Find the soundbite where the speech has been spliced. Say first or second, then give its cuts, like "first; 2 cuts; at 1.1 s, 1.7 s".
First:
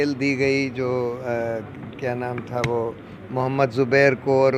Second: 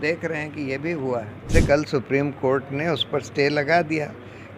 second; 1 cut; at 1.5 s